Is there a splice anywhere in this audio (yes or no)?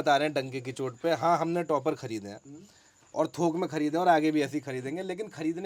no